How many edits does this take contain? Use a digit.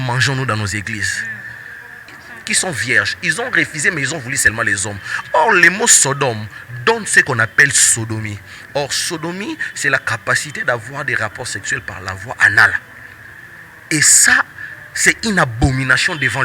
1